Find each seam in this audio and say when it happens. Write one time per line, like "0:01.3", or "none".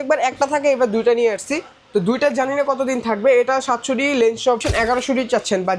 0:04.6